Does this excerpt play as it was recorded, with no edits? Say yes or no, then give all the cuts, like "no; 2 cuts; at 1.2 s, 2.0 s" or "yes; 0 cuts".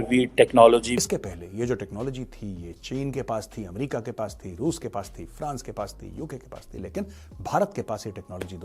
no; 1 cut; at 0.9 s